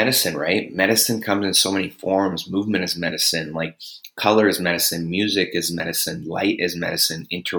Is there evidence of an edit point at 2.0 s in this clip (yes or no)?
no